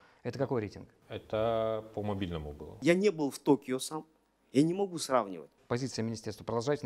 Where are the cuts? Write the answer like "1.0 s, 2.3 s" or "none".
2.7 s, 5.5 s